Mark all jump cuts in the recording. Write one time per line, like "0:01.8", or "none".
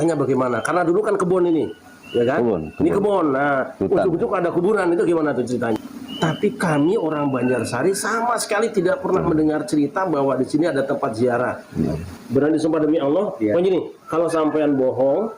0:05.8
0:12.1